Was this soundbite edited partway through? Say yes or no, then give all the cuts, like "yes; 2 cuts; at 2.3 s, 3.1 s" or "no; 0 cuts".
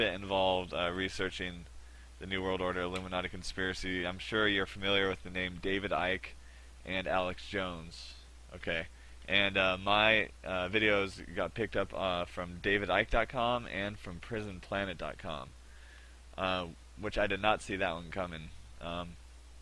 no; 0 cuts